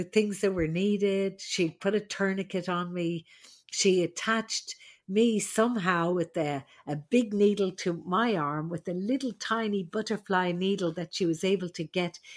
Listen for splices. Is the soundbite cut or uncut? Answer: uncut